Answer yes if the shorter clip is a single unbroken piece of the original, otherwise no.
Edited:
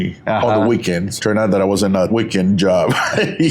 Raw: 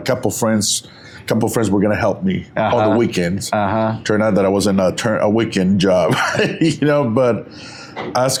no